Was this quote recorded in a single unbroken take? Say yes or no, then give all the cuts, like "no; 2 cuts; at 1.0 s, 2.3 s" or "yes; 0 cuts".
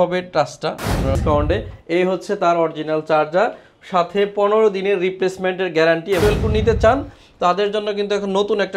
no; 2 cuts; at 1.2 s, 6.2 s